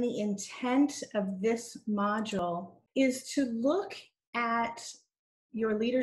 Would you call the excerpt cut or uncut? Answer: cut